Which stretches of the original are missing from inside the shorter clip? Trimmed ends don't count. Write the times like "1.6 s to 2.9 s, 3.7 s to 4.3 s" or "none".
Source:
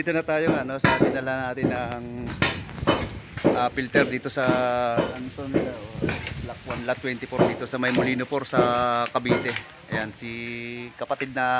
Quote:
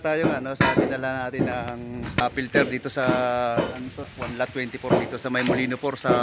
2.4 s to 3.6 s, 5.4 s to 6.5 s

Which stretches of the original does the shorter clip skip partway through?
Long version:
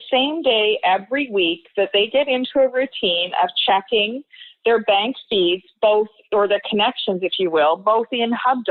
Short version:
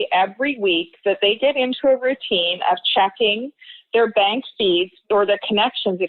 5.7 s to 6.2 s

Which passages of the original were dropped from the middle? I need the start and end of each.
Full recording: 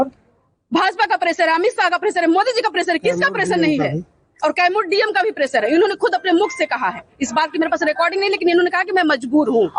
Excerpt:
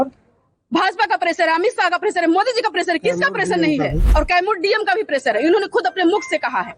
4.0 s to 4.3 s

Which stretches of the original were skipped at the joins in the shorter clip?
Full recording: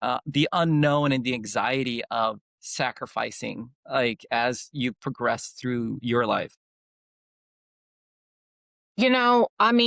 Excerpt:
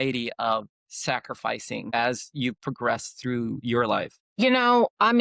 3.6 s to 4.2 s, 6.6 s to 8.8 s

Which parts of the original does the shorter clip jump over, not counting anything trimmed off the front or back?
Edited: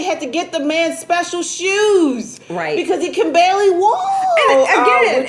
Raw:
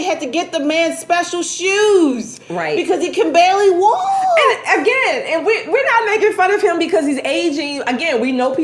none

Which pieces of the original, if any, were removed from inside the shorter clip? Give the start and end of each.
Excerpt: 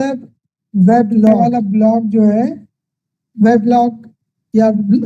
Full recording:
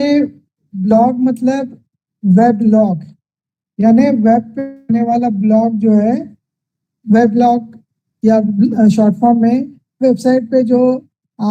2.9 s to 5.1 s

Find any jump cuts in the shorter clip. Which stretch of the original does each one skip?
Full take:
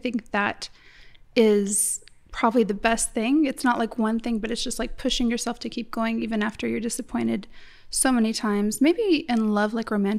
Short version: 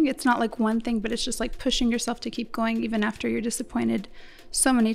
none

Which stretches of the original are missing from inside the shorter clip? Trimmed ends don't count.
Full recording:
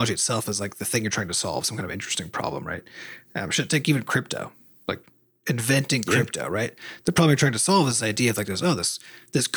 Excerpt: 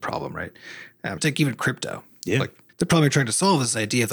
3.5 s to 3.7 s, 5.1 s to 6.9 s

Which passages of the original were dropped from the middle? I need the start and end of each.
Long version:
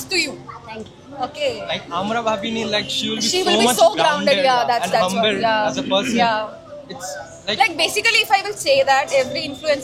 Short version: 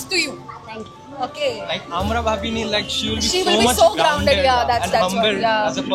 none

